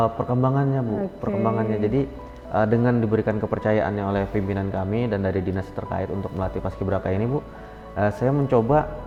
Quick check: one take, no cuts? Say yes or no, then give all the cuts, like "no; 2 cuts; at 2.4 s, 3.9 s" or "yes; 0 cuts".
yes; 0 cuts